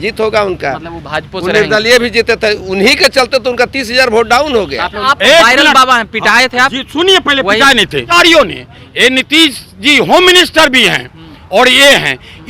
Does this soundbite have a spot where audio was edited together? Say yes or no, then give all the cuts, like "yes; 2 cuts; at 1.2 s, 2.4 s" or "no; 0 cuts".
yes; 2 cuts; at 5.0 s, 8.1 s